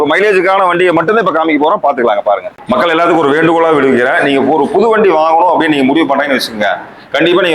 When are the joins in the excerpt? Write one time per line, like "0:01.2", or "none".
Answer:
0:02.6